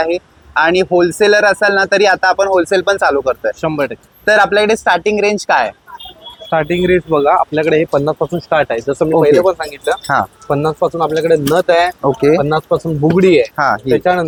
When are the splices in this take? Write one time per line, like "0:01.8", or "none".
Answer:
none